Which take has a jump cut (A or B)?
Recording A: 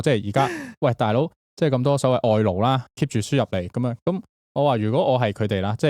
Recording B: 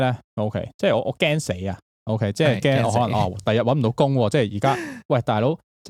A